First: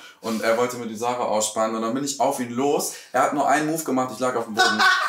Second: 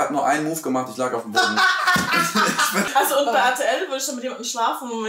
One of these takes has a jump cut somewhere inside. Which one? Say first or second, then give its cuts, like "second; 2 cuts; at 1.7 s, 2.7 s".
second; 1 cut; at 2.9 s